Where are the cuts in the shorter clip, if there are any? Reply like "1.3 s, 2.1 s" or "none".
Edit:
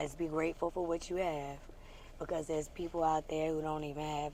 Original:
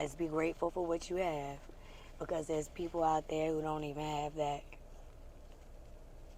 none